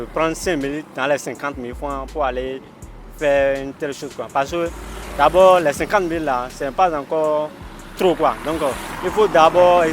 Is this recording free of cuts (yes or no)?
yes